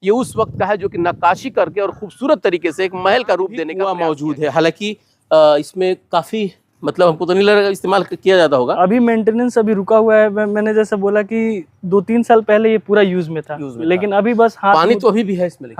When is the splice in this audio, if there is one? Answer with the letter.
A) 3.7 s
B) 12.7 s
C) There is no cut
A